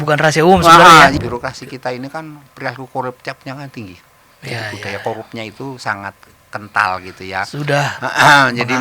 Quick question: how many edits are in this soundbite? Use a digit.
1